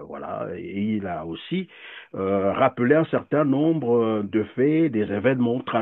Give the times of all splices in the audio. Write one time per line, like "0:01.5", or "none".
none